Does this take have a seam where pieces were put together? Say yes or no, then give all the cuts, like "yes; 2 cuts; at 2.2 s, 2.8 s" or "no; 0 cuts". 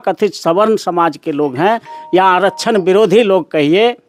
no; 0 cuts